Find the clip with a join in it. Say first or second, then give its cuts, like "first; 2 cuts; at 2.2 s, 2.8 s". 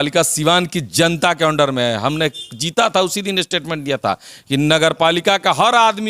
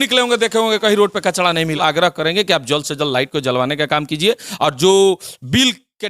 second; 1 cut; at 1.8 s